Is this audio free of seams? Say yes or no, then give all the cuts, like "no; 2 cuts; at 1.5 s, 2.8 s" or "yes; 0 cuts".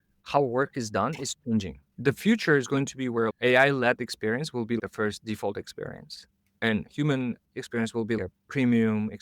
no; 3 cuts; at 1.8 s, 3.3 s, 4.8 s